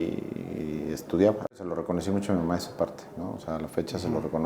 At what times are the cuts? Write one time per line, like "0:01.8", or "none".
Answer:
0:01.7